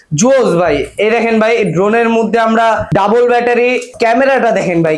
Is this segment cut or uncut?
cut